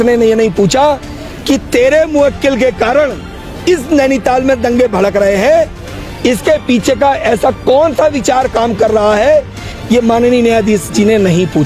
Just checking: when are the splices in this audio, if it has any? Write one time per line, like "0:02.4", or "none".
0:09.7